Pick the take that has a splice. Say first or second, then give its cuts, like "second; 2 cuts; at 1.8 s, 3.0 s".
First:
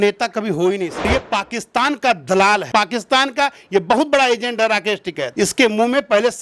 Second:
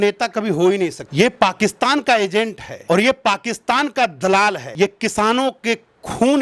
first; 2 cuts; at 1.1 s, 2.7 s